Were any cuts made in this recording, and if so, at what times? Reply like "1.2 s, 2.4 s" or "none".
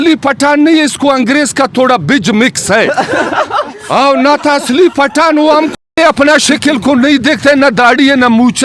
5.9 s